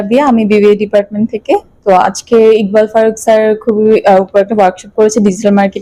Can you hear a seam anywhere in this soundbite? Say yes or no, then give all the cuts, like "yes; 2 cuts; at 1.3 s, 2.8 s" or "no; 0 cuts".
no; 0 cuts